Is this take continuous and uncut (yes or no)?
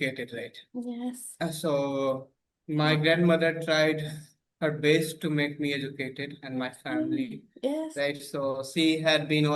yes